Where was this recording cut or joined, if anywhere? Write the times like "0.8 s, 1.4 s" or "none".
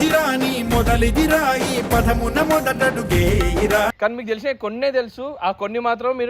4.0 s